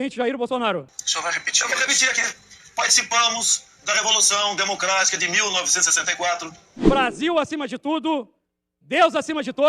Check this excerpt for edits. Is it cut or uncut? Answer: cut